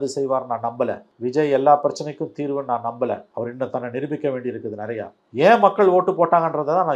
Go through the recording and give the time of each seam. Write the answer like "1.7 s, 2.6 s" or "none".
1.1 s, 3.3 s, 5.2 s